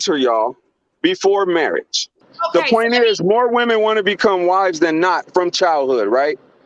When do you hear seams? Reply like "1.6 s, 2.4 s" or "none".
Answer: 2.3 s

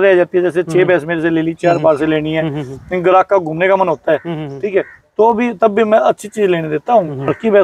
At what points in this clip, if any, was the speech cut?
none

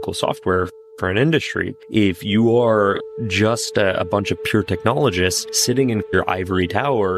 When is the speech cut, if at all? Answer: none

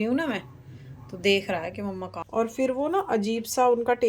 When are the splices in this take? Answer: 2.1 s

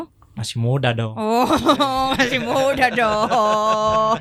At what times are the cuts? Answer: none

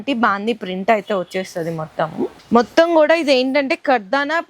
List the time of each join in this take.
2.4 s

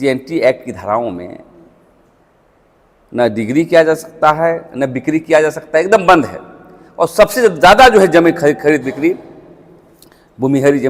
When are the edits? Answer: none

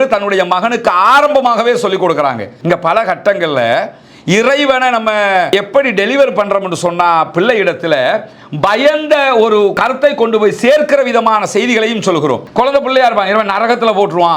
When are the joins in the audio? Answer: 2.5 s, 5.5 s, 9.8 s, 12.5 s

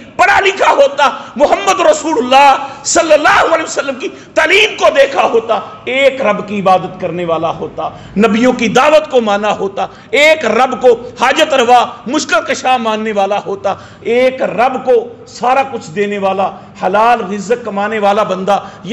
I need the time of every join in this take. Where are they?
none

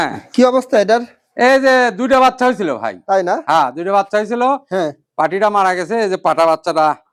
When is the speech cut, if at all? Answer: none

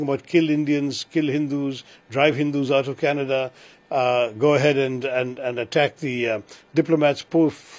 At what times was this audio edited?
none

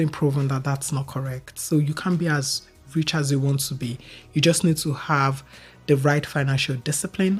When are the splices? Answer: none

